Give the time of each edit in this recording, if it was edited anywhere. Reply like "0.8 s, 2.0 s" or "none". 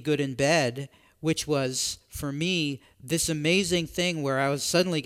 none